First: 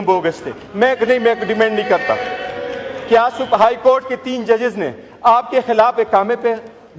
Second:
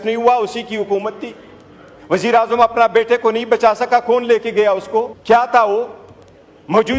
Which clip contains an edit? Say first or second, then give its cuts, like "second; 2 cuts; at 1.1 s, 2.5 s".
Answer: second; 1 cut; at 5.1 s